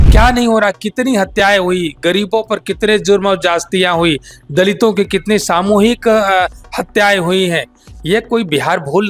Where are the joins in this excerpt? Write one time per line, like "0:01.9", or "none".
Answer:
none